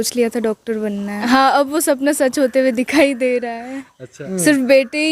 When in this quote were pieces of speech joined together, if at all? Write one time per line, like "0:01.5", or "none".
0:01.2
0:04.2